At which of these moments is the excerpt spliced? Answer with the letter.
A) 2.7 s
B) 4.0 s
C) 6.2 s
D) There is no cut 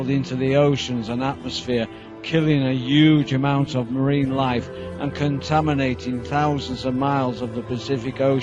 D